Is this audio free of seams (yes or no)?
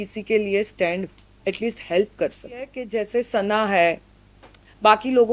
no